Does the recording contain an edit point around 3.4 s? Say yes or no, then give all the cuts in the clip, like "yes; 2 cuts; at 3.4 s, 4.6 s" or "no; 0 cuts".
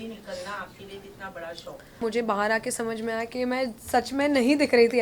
no; 1 cut; at 2.0 s